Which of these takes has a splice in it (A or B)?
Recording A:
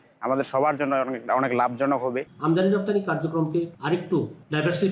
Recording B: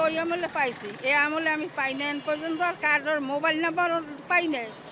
A